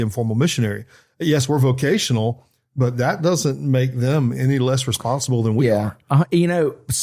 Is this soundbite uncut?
yes; 0 cuts

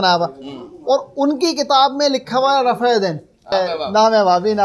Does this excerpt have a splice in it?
yes; 1 cut; at 3.5 s

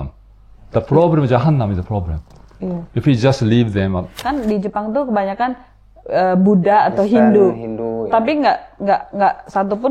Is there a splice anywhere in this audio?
yes; 1 cut; at 4.2 s

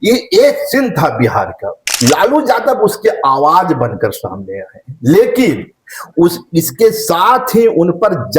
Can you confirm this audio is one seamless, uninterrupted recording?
no; 1 cut; at 1.9 s

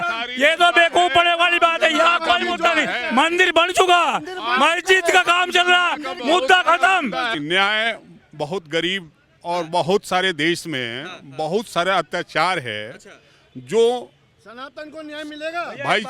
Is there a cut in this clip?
yes; 1 cut; at 7.3 s

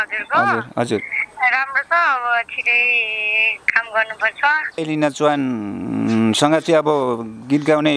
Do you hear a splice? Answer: yes; 1 cut; at 4.8 s

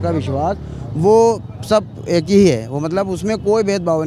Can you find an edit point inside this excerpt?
no; 0 cuts

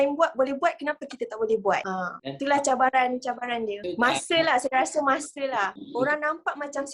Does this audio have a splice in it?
yes; 1 cut; at 5.8 s

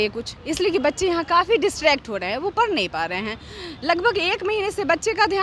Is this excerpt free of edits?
yes; 0 cuts

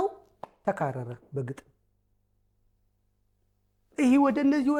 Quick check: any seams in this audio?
no; 0 cuts

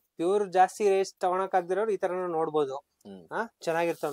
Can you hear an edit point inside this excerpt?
no; 0 cuts

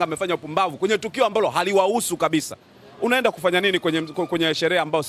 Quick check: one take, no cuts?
yes; 0 cuts

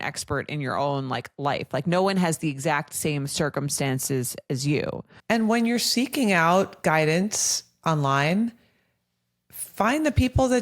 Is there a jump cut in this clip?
yes; 1 cut; at 5.1 s

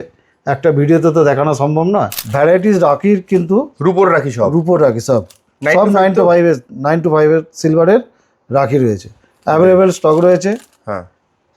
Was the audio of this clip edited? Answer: yes; 1 cut; at 2.2 s

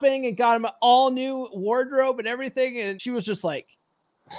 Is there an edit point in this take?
yes; 1 cut; at 3.0 s

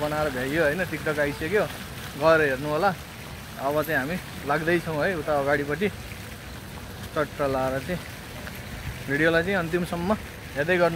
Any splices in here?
no; 0 cuts

